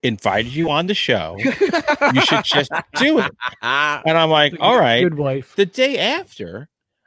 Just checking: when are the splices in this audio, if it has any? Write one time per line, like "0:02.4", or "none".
0:05.4

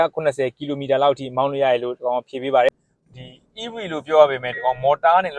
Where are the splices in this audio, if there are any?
0:02.7

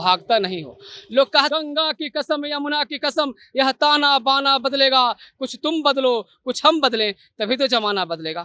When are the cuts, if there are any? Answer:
0:01.5

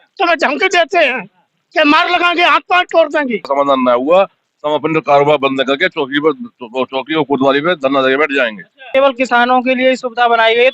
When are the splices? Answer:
0:03.5
0:08.8

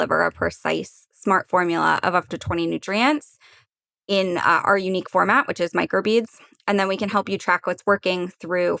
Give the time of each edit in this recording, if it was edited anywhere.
none

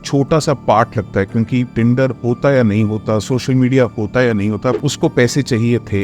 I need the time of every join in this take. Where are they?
0:04.8

